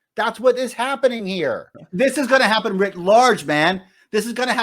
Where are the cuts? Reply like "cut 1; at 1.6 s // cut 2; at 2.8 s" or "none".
cut 1; at 1.8 s